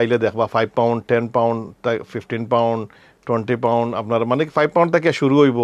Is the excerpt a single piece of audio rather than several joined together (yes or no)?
yes